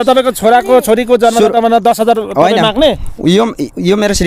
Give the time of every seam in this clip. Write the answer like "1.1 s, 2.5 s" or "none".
3.0 s